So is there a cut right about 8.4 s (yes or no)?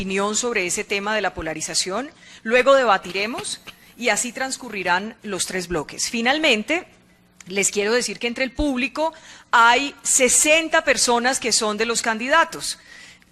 no